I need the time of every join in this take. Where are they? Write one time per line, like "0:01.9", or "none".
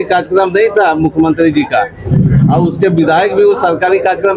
none